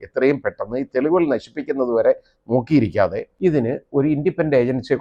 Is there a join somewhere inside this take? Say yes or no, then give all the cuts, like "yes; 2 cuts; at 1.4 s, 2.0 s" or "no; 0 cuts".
yes; 1 cut; at 3.3 s